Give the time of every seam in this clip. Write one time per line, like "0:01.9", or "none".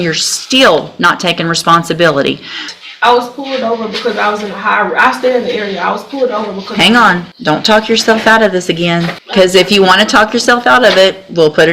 0:02.7
0:07.3
0:09.2